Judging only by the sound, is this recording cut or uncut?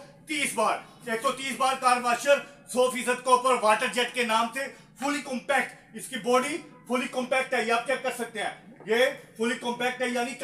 uncut